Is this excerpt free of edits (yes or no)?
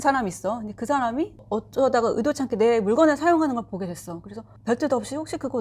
no